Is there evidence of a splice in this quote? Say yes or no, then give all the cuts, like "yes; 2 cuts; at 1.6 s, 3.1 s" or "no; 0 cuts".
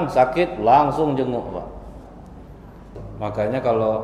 yes; 1 cut; at 3.0 s